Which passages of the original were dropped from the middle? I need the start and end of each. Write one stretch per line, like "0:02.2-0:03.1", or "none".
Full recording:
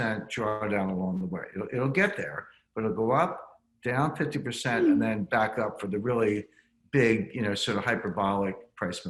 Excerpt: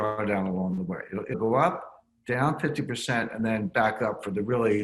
0:01.8-0:02.9